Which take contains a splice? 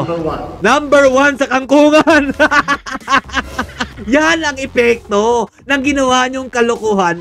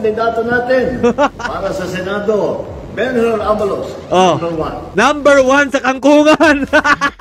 first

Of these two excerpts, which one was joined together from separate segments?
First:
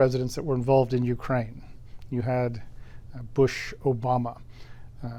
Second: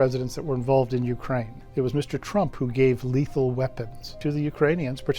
second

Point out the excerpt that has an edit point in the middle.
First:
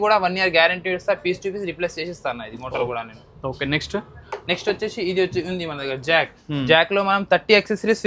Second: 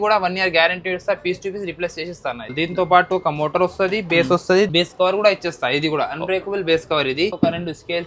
second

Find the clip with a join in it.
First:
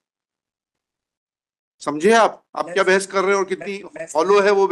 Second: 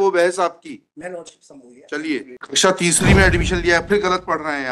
second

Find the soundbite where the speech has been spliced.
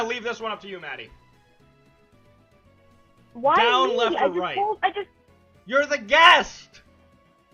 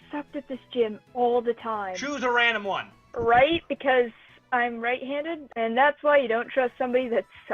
second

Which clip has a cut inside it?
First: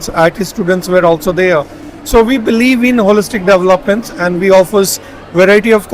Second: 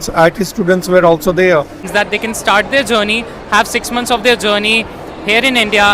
second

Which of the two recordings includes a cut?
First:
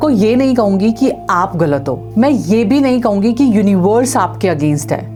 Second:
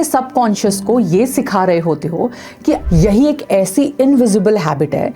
second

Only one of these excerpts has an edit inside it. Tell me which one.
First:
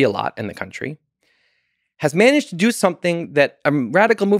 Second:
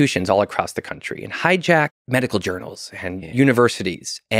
second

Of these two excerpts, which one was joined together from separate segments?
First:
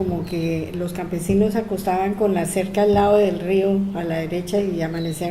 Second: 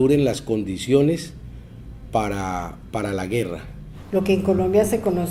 first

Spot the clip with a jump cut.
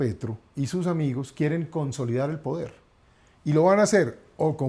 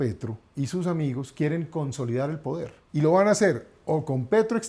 second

